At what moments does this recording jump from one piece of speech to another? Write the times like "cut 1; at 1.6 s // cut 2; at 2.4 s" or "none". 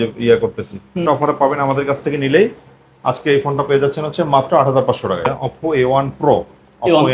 cut 1; at 1.0 s // cut 2; at 5.3 s